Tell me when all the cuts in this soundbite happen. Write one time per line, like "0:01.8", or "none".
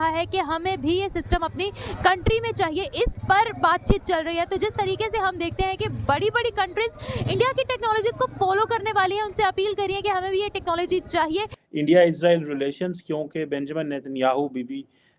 0:11.5